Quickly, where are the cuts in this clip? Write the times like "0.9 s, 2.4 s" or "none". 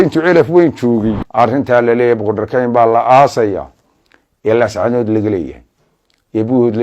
1.2 s